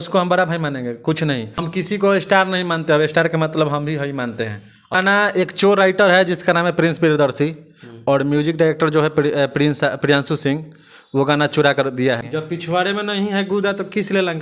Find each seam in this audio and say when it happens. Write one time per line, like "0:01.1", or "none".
0:01.6
0:04.9
0:12.2